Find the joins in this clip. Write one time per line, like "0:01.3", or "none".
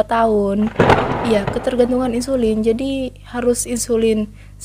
0:00.9